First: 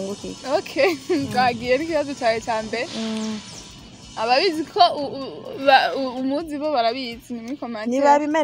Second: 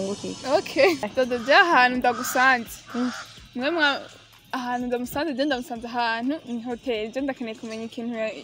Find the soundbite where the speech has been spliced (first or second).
second